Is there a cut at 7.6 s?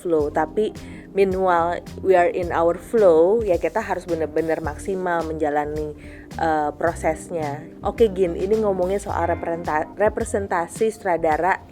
yes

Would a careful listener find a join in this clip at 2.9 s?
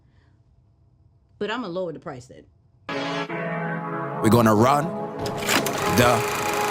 yes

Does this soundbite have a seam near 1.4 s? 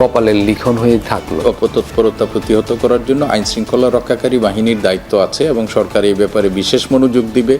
yes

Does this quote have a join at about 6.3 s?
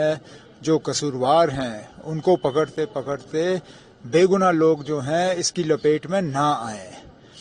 yes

